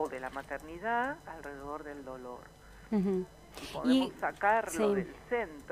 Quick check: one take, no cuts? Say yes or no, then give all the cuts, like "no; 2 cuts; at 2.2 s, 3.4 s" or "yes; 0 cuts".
yes; 0 cuts